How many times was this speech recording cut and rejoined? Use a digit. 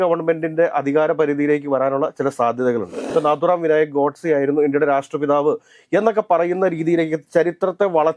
1